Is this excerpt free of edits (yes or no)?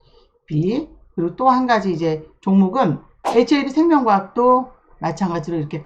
no